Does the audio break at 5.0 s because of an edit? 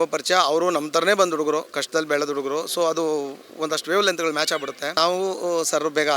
yes; 1 cut; at 5.0 s

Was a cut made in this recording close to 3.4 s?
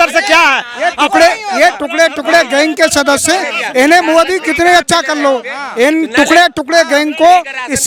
no; 0 cuts

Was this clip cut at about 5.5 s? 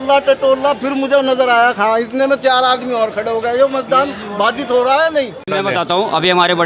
yes; 1 cut; at 5.5 s

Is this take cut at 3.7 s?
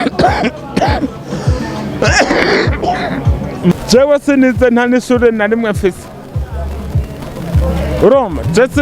yes; 1 cut; at 3.7 s

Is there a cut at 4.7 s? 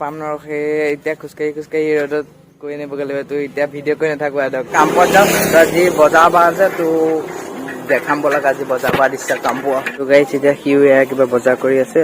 yes; 2 cuts; at 4.7 s, 10.0 s

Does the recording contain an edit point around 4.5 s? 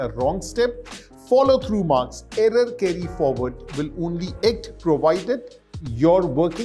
no; 0 cuts

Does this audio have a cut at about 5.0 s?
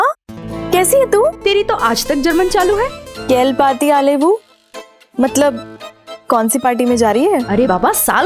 no; 1 cut; at 3.1 s

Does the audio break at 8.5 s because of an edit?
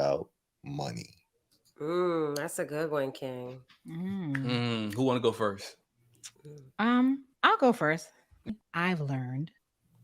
yes; 1 cut; at 8.5 s

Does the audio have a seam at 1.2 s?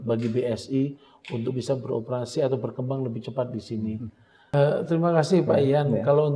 no; 1 cut; at 4.4 s

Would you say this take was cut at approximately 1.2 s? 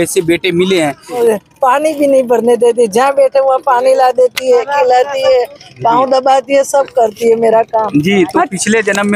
yes; 1 cut; at 1.2 s

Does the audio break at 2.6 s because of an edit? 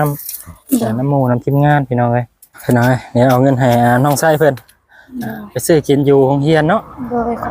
yes; 1 cut; at 2.6 s

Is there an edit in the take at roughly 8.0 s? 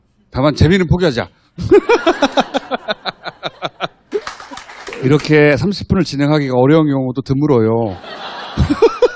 no; 1 cut; at 4.0 s

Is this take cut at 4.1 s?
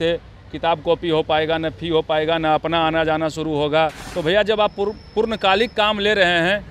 yes; 1 cut; at 4.1 s

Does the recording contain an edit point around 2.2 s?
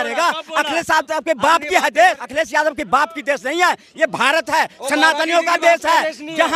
yes; 1 cut; at 2.2 s

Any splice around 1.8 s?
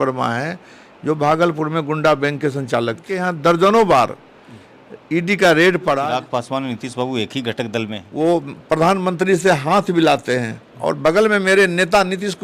no; 3 cuts; at 3.1 s, 6.0 s, 8.0 s

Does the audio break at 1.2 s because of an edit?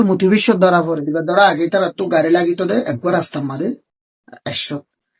yes; 1 cut; at 1.2 s

